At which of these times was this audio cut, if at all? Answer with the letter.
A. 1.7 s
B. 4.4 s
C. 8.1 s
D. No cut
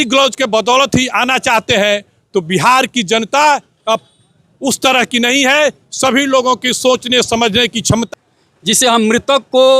C